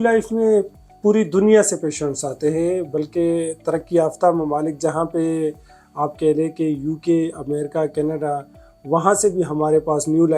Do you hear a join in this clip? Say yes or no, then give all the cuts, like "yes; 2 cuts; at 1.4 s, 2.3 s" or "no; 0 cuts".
no; 0 cuts